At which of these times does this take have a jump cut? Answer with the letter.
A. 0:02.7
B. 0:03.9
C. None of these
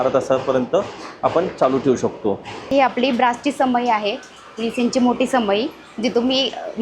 A